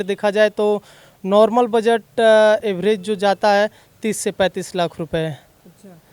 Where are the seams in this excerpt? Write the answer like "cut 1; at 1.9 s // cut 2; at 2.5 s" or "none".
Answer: none